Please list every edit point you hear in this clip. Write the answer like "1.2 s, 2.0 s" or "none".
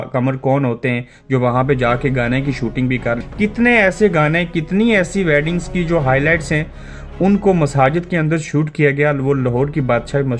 3.2 s